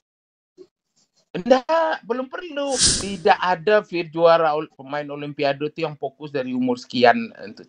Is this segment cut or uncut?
cut